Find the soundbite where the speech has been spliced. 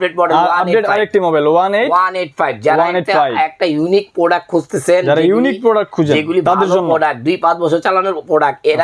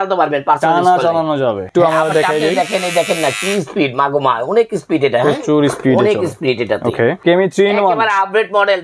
second; 2 cuts; at 1.7 s, 7.2 s

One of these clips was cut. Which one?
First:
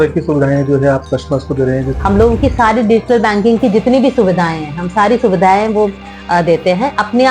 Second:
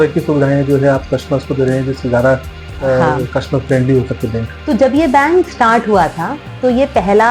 first; 1 cut; at 1.9 s

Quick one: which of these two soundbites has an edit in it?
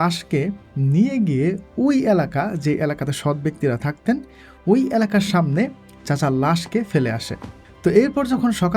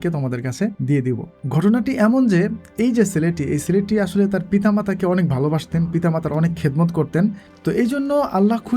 second; 2 cuts; at 0.9 s, 7.4 s

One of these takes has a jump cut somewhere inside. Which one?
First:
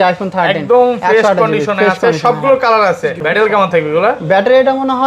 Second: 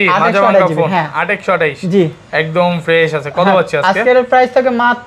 first; 1 cut; at 3.2 s

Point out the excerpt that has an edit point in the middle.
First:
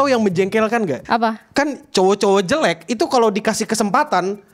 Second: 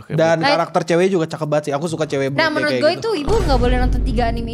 first; 1 cut; at 1.0 s

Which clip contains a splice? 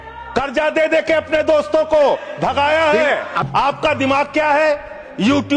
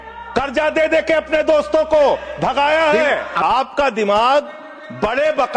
first; 1 cut; at 3.3 s

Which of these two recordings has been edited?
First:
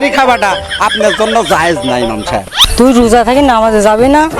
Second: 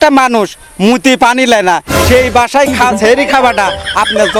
first; 1 cut; at 2.7 s

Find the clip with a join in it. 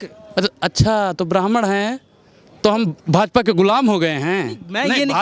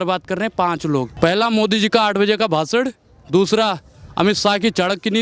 second; 1 cut; at 1.1 s

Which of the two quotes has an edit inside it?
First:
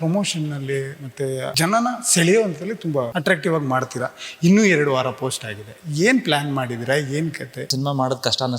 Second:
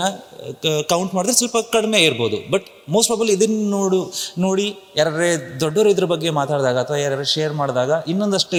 first; 3 cuts; at 1.5 s, 3.1 s, 7.7 s

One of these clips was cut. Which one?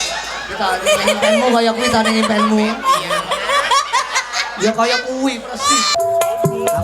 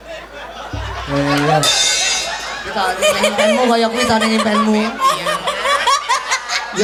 first; 1 cut; at 5.9 s

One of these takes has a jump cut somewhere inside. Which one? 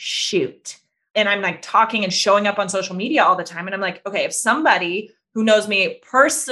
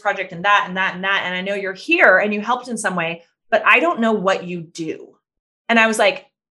first; 1 cut; at 1.1 s

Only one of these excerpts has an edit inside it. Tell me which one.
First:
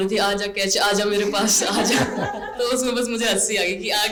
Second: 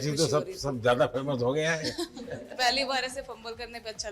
second; 1 cut; at 2.5 s

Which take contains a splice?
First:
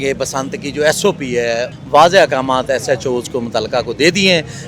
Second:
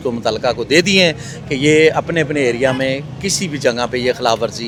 first; 1 cut; at 1.7 s

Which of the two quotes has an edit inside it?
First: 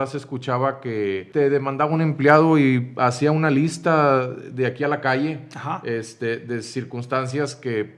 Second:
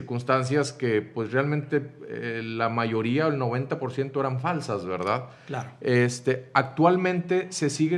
first; 1 cut; at 1.2 s

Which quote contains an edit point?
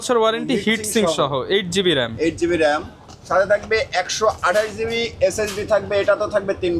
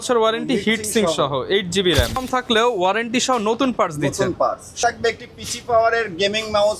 second; 2 cuts; at 2.2 s, 4.8 s

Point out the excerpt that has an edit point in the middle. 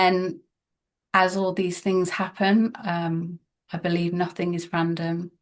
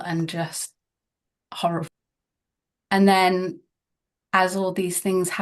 second; 1 cut; at 1.9 s

